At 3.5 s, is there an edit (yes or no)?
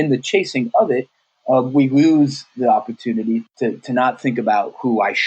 yes